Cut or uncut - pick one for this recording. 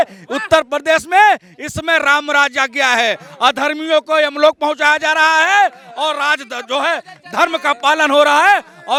uncut